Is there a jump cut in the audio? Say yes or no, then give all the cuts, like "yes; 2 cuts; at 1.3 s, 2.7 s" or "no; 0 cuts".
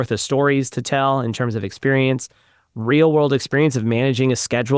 no; 0 cuts